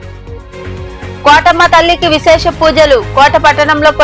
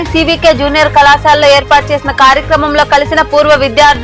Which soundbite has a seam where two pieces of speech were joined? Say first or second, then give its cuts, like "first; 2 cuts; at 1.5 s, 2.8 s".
first; 1 cut; at 1.2 s